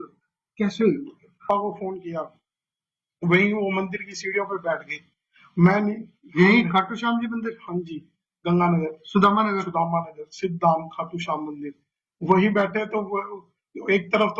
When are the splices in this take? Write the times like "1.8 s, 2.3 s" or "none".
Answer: 1.5 s